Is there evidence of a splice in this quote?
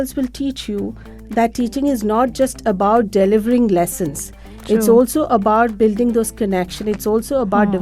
no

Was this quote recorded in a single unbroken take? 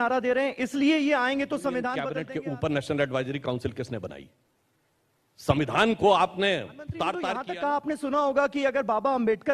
no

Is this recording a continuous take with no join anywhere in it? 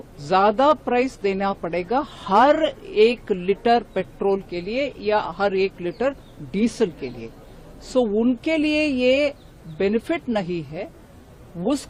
yes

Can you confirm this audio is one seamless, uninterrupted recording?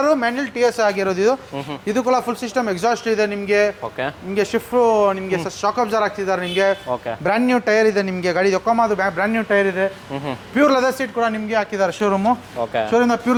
yes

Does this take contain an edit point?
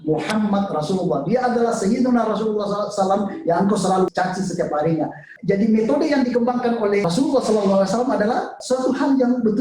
yes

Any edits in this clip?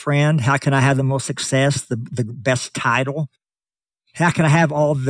yes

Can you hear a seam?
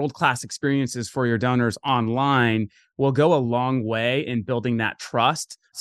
no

